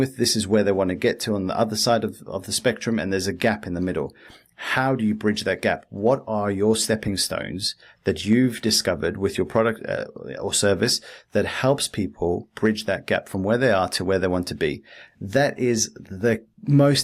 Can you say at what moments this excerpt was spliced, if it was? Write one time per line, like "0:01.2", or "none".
none

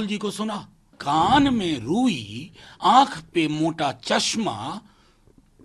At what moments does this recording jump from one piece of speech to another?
0:01.0

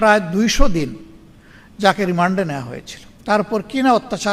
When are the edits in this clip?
none

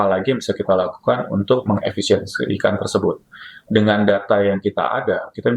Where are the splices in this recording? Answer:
none

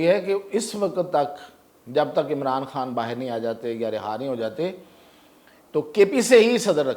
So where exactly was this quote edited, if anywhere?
none

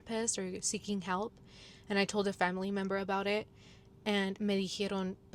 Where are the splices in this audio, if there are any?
0:04.4

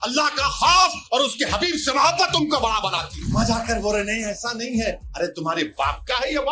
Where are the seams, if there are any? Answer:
0:03.1

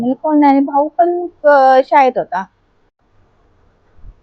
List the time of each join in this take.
0:02.8

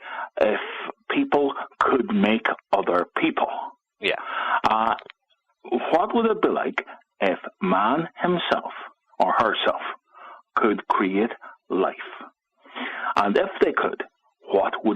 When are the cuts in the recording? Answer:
0:13.1

